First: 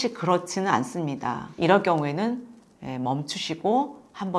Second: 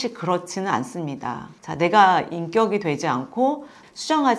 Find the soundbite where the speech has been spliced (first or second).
first